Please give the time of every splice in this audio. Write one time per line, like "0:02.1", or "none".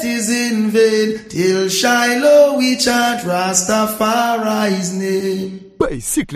none